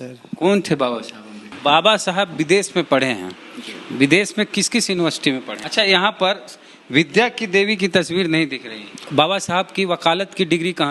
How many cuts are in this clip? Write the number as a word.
three